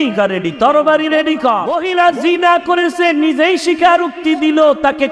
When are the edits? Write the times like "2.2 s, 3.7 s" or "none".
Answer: 1.8 s